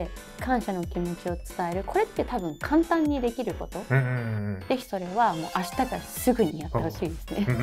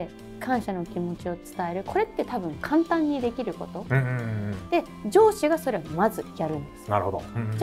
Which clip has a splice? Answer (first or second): first